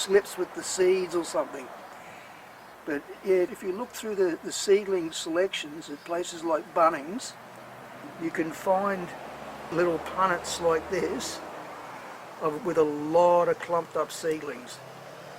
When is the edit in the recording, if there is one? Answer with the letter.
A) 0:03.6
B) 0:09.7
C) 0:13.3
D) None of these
B